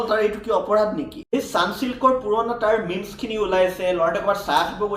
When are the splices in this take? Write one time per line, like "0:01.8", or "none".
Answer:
0:01.1